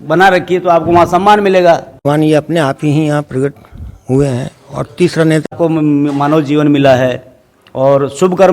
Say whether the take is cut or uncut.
cut